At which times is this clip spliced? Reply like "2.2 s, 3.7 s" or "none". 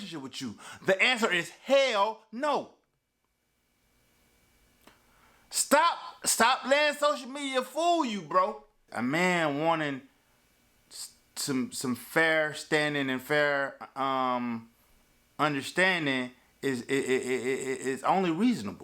8.8 s